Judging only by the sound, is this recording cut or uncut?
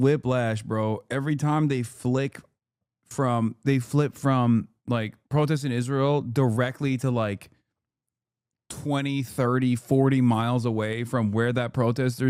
uncut